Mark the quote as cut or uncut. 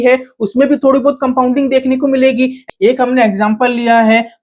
cut